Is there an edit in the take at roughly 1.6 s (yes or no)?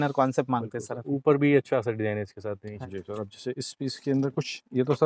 no